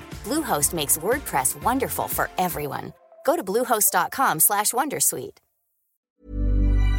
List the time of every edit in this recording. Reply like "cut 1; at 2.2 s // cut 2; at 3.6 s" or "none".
cut 1; at 6.1 s

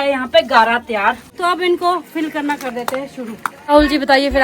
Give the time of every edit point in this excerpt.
cut 1; at 1.3 s // cut 2; at 3.5 s

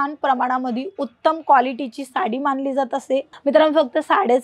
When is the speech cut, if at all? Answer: cut 1; at 3.3 s

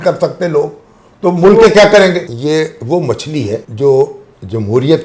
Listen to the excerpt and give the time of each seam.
cut 1; at 2.2 s // cut 2; at 3.7 s

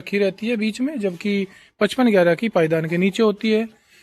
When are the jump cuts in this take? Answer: none

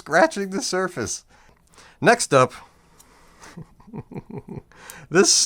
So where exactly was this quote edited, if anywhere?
cut 1; at 1.4 s

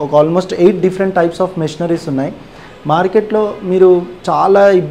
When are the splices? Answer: none

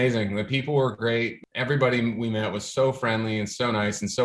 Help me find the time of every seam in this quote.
cut 1; at 1.4 s

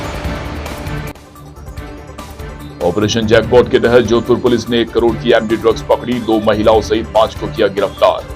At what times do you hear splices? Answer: cut 1; at 1.5 s

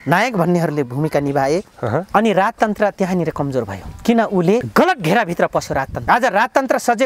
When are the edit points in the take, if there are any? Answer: cut 1; at 4.7 s // cut 2; at 5.9 s

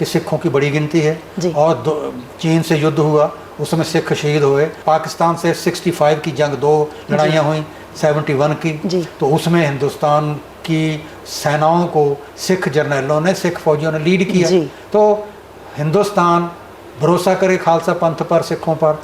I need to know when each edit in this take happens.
cut 1; at 4.8 s

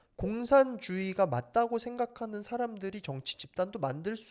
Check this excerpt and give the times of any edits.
none

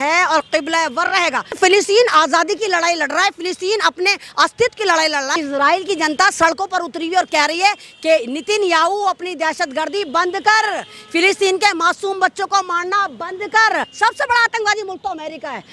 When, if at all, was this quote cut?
cut 1; at 1.6 s // cut 2; at 5.4 s // cut 3; at 13.9 s

